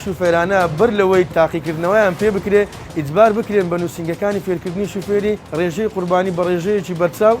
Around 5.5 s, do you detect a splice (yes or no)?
yes